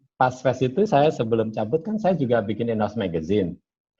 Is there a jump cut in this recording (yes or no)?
no